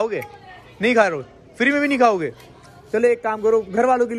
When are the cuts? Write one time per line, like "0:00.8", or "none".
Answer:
none